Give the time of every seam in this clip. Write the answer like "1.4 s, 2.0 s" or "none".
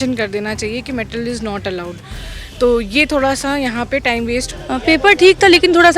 4.5 s

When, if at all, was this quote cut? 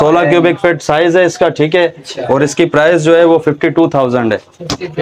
none

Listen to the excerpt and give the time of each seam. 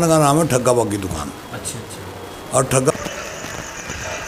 2.9 s

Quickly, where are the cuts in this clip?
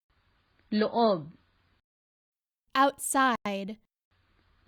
none

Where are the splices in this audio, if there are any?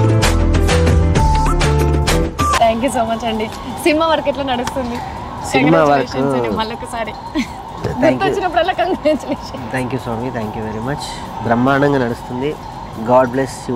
none

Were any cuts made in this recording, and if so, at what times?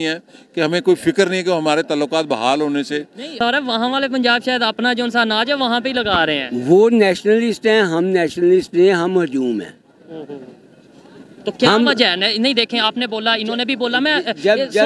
3.4 s

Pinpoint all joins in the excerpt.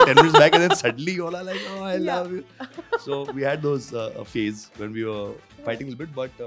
none

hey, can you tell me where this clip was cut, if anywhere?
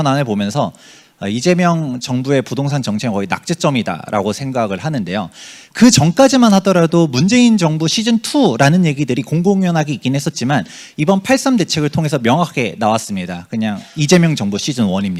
none

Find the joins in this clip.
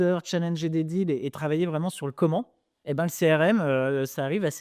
none

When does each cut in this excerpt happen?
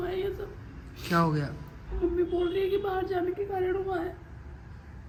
none

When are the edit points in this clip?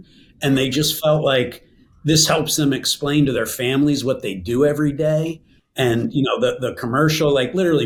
none

